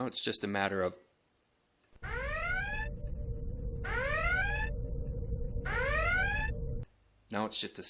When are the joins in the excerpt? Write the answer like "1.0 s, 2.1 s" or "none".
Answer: 1.0 s